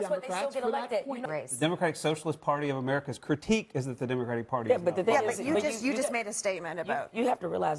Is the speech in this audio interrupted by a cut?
yes; 1 cut; at 1.2 s

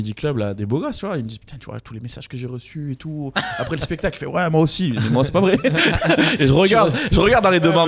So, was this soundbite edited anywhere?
no; 0 cuts

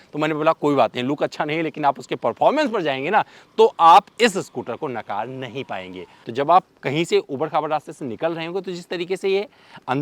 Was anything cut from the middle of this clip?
yes; 1 cut; at 6.1 s

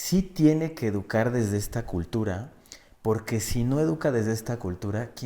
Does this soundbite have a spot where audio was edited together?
no; 0 cuts

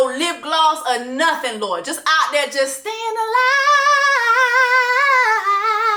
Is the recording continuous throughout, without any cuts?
yes; 0 cuts

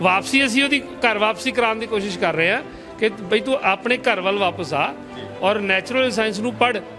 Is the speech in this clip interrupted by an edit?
no; 0 cuts

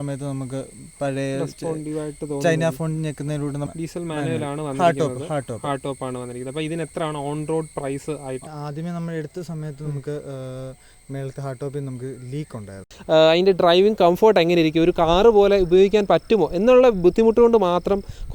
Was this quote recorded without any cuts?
no; 3 cuts; at 3.7 s, 8.4 s, 12.9 s

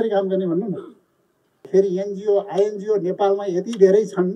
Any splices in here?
yes; 1 cut; at 1.6 s

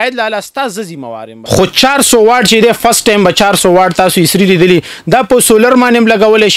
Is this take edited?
yes; 1 cut; at 1.4 s

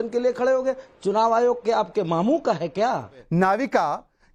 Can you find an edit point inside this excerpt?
yes; 1 cut; at 3.1 s

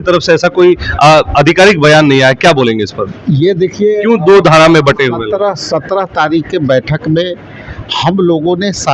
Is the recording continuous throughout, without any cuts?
yes; 0 cuts

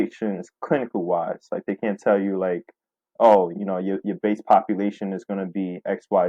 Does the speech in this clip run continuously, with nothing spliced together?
yes; 0 cuts

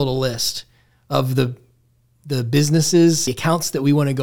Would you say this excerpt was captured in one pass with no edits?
no; 1 cut; at 3.3 s

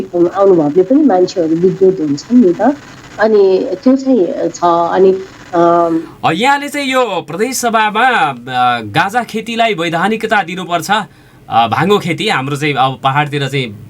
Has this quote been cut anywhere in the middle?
yes; 1 cut; at 6.0 s

